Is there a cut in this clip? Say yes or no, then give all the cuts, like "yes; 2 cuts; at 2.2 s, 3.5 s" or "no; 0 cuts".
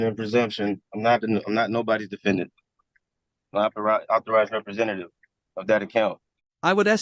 no; 0 cuts